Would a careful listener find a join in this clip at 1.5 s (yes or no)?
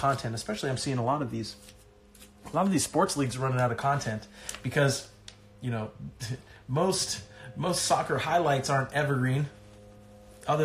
no